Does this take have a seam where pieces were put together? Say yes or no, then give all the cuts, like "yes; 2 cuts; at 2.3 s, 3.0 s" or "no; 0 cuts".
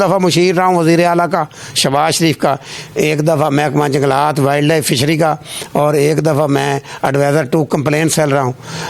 no; 0 cuts